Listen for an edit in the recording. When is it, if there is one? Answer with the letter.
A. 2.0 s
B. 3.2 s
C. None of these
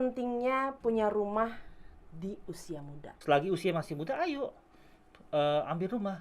B